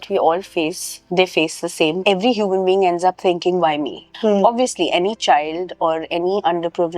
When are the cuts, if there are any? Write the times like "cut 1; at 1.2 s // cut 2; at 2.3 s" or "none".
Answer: cut 1; at 2.0 s // cut 2; at 4.1 s